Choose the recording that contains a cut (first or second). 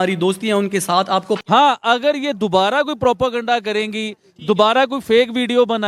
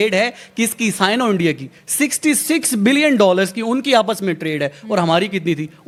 first